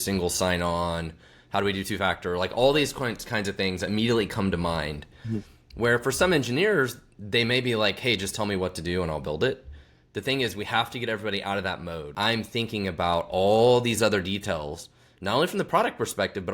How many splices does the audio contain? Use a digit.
1